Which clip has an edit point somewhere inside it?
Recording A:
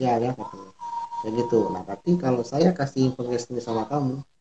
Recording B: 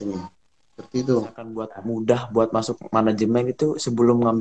B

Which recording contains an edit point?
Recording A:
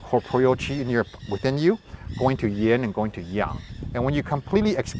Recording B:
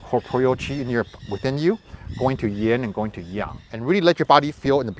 B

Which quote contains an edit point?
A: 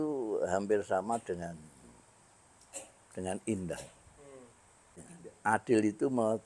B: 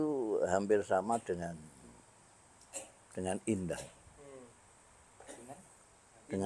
A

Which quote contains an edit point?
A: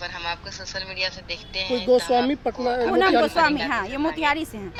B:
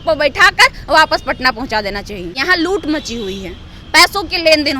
B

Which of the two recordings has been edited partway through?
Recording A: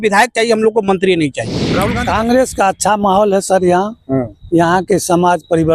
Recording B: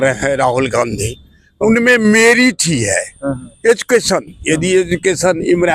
A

